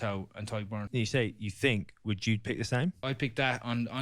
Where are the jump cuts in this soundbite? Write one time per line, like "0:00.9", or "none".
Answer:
0:00.9
0:03.0